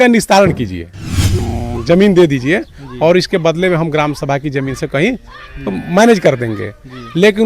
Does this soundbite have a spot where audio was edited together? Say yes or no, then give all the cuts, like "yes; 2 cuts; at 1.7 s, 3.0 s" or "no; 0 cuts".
yes; 1 cut; at 1.4 s